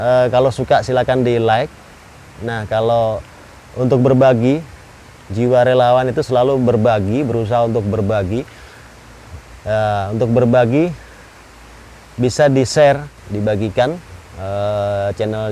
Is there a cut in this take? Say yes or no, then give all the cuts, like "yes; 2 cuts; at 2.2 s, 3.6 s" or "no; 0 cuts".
yes; 1 cut; at 13.2 s